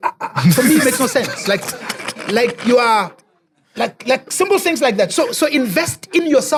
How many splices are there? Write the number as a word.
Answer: zero